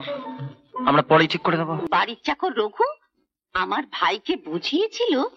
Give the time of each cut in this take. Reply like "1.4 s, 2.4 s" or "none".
1.9 s